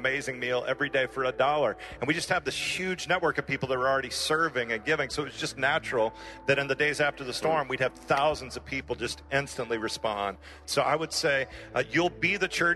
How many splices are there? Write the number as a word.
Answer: one